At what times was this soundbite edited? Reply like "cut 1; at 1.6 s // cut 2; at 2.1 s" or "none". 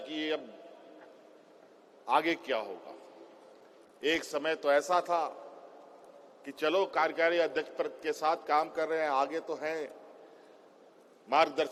none